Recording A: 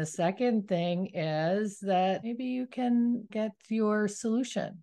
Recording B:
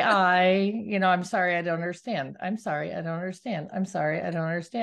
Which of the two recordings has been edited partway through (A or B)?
A